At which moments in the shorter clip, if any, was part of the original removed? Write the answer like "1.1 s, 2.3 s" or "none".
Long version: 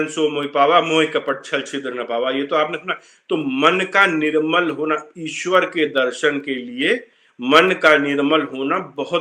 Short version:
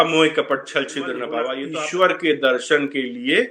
1.6 s

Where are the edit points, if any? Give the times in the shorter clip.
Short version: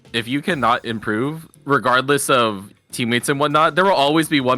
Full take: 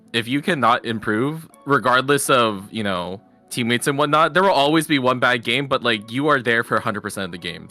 2.7 s

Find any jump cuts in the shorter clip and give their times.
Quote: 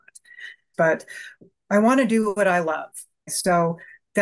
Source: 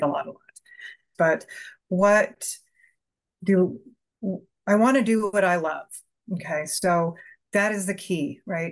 1.4 s, 3.3 s

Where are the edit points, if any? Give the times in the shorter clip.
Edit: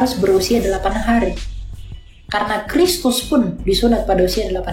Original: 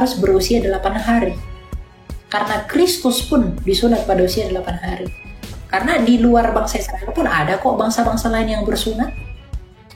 none

